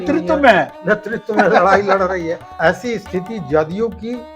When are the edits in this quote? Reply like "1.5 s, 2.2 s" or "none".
2.4 s